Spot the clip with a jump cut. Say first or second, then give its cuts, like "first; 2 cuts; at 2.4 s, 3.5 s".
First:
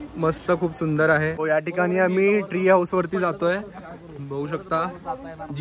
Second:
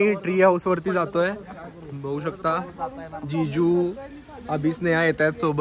first; 1 cut; at 1.4 s